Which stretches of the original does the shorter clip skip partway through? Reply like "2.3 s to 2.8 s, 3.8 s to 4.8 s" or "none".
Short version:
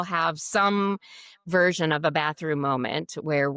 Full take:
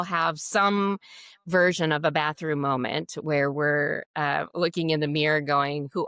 none